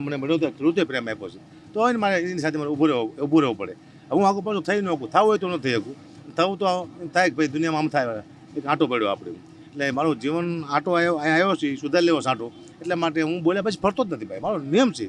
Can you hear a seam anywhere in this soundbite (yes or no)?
no